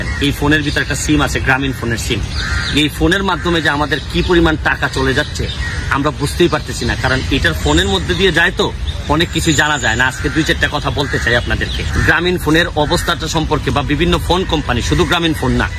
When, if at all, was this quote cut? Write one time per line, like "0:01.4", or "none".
none